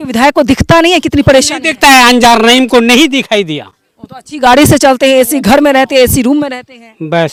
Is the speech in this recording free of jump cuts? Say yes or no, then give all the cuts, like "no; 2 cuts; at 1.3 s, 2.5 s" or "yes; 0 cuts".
yes; 0 cuts